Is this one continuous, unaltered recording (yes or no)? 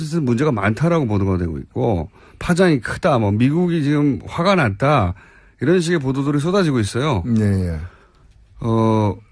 yes